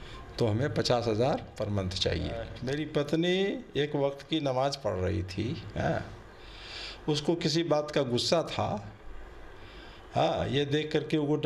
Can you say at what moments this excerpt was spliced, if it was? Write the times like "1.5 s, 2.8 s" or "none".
2.6 s